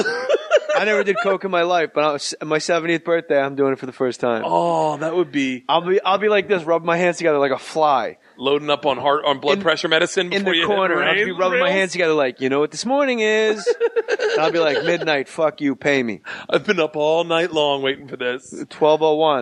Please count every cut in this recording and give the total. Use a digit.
1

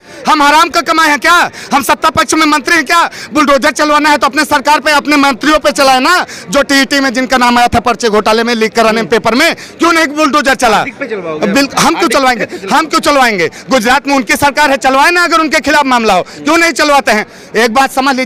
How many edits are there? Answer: 0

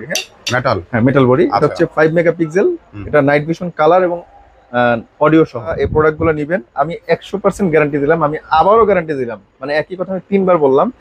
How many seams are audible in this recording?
1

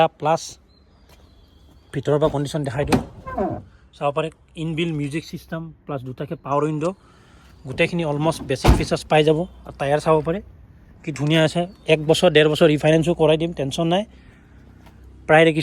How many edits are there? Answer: 0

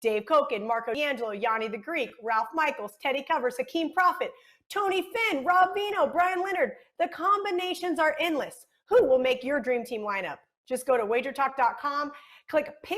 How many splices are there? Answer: 1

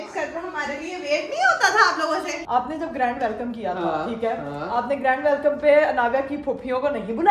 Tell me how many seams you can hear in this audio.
1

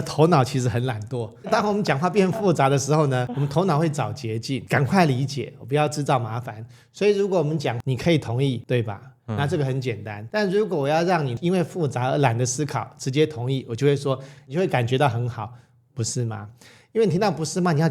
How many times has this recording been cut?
7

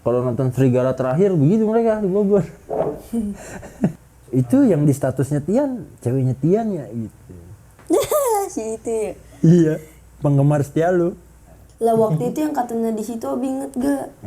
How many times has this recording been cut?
2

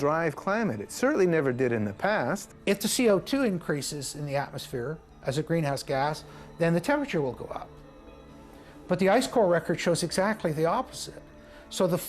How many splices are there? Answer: 1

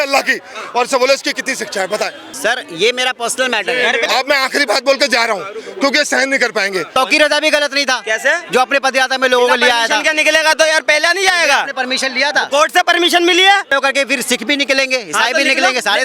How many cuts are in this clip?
4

